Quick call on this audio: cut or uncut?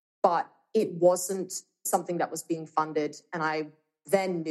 cut